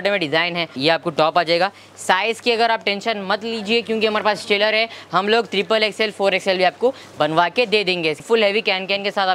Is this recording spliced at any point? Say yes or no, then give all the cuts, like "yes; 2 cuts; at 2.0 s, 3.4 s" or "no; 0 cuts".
yes; 2 cuts; at 0.8 s, 8.2 s